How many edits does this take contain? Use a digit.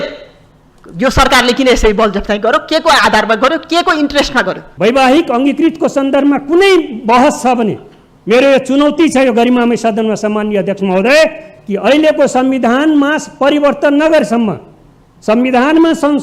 1